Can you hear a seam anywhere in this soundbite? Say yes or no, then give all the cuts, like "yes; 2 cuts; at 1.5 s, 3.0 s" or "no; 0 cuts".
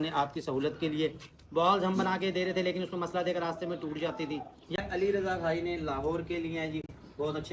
yes; 1 cut; at 4.8 s